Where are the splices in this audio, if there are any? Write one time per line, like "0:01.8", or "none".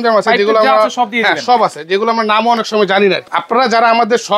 0:03.3

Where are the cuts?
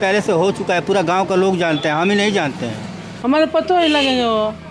0:03.1

